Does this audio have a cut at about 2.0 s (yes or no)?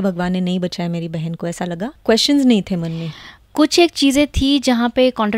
yes